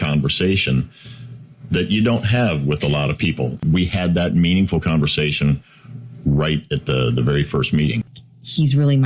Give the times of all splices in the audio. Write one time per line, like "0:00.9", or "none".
0:03.6
0:08.0